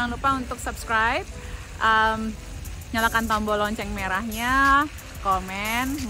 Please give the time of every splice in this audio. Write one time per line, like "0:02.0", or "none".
none

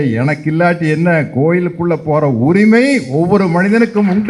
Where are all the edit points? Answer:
none

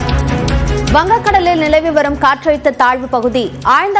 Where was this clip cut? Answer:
none

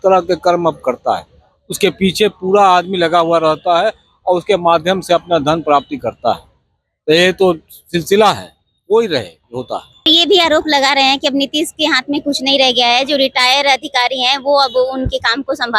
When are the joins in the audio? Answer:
0:10.0

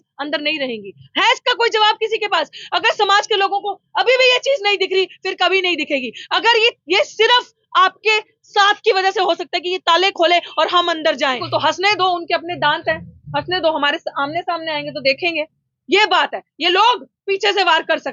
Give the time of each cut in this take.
0:11.4

